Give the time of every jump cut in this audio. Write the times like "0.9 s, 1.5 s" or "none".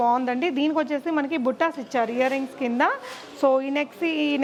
none